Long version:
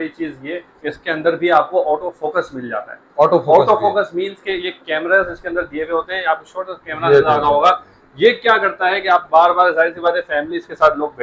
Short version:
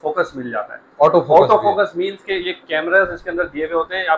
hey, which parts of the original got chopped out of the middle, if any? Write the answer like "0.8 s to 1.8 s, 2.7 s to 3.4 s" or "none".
none